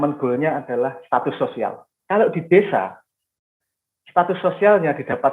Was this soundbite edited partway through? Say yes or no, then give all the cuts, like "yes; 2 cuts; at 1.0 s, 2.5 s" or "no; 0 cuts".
yes; 1 cut; at 1.9 s